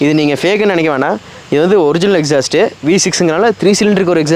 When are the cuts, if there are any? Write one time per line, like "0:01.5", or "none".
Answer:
none